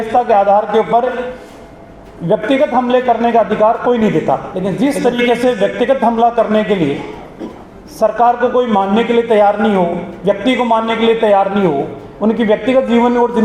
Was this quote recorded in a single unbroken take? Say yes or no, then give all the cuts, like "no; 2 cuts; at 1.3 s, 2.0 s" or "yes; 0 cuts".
no; 1 cut; at 4.6 s